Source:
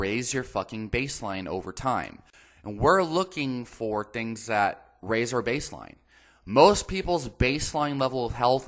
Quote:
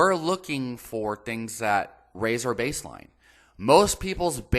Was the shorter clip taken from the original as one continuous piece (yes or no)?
yes